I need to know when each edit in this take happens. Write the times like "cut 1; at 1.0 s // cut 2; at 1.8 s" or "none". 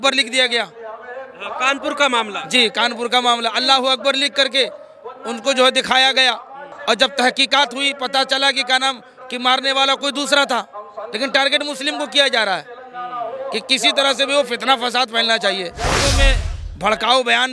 cut 1; at 6.7 s // cut 2; at 16.2 s